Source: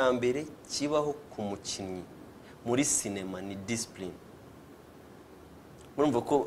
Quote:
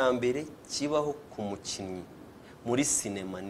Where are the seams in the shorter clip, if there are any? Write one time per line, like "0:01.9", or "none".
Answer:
none